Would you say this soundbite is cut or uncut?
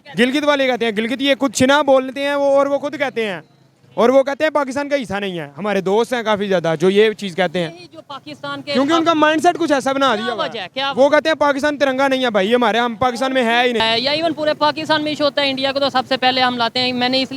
cut